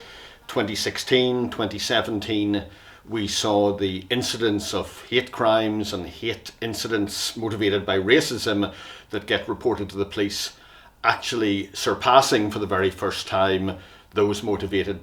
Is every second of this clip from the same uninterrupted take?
yes; 0 cuts

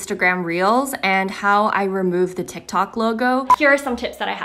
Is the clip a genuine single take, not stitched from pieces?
no; 1 cut; at 3.5 s

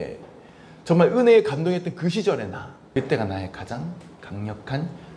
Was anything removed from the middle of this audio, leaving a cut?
yes; 1 cut; at 2.8 s

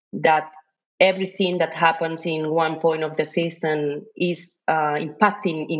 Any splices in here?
no; 0 cuts

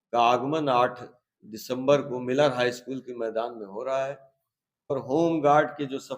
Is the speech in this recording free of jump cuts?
no; 1 cut; at 4.9 s

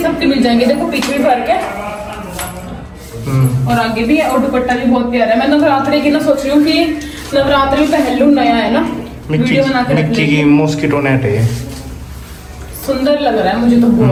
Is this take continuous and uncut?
yes; 0 cuts

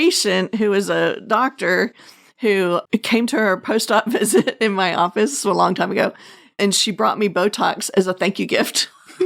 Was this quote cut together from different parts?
yes; 1 cut; at 6.5 s

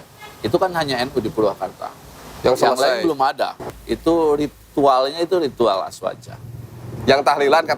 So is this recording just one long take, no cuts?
no; 1 cut; at 3.6 s

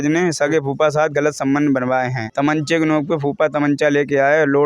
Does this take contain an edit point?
no; 0 cuts

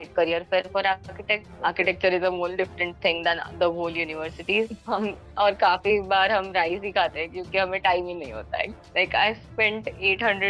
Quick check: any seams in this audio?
yes; 3 cuts; at 1.5 s, 4.7 s, 8.8 s

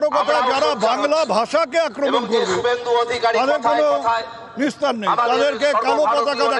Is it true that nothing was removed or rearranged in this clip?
yes; 0 cuts

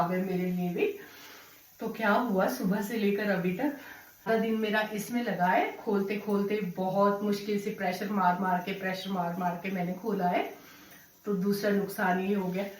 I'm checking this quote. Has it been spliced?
yes; 1 cut; at 4.3 s

